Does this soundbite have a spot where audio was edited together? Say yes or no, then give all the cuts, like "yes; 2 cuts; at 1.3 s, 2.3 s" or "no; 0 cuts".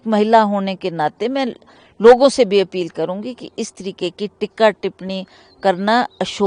no; 0 cuts